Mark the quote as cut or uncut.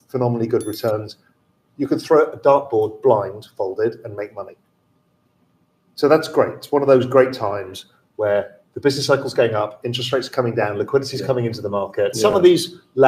cut